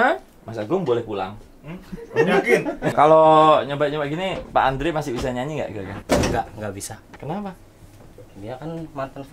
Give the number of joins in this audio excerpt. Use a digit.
2